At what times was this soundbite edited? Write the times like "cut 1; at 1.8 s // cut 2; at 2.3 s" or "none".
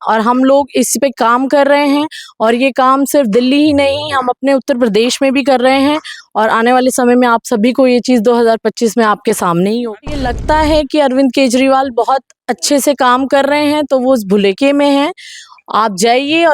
cut 1; at 10.3 s